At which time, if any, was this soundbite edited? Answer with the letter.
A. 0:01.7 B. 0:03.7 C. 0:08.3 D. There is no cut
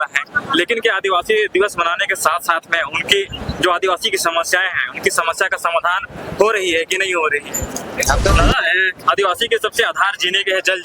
C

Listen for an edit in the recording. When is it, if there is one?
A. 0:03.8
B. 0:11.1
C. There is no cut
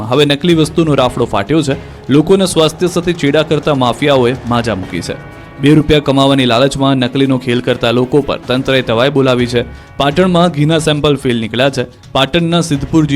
A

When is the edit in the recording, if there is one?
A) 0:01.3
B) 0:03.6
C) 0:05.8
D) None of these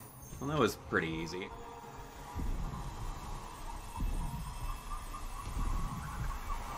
A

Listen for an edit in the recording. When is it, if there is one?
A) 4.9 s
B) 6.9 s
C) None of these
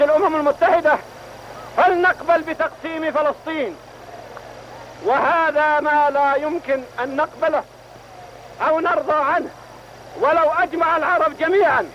B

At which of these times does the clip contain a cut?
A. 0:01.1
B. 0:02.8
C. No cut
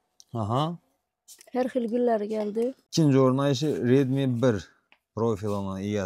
B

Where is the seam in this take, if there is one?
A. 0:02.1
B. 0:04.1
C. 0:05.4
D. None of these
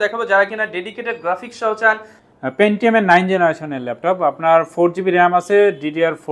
A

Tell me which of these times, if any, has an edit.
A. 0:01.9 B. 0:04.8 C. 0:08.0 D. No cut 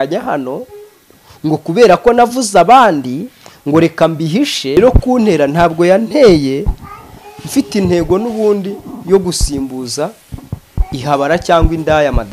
B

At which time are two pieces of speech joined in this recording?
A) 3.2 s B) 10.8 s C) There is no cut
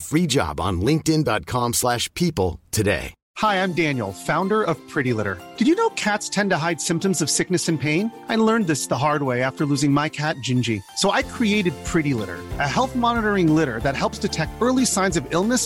A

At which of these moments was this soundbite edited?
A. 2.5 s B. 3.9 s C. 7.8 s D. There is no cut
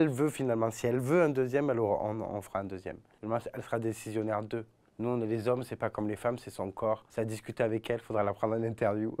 D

